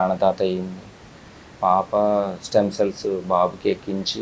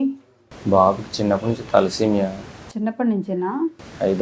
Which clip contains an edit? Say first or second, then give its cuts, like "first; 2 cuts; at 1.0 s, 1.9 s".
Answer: first; 1 cut; at 1.5 s